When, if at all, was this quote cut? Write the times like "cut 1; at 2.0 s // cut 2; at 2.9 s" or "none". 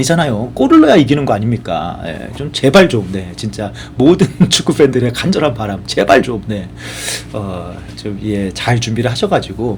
none